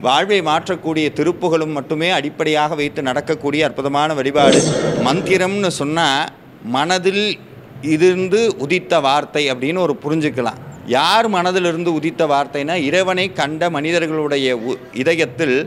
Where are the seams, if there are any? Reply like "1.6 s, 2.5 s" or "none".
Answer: 4.8 s

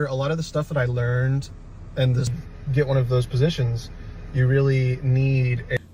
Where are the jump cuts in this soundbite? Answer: none

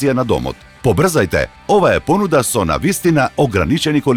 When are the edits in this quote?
none

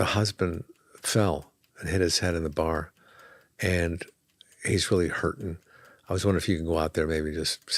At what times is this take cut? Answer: none

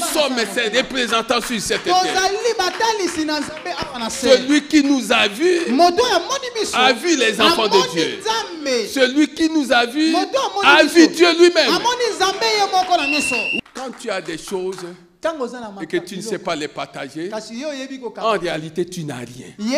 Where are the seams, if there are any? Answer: 13.5 s

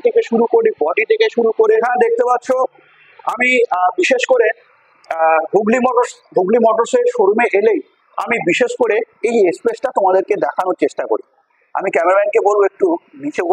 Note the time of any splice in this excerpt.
1.8 s

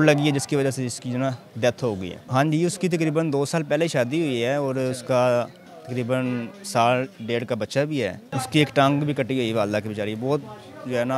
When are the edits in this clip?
2.2 s, 8.2 s

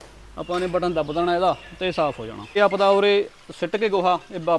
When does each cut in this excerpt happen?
2.4 s

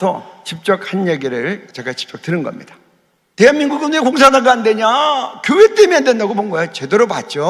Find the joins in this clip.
1.7 s

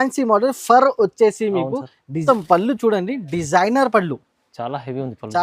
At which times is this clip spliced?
2.2 s

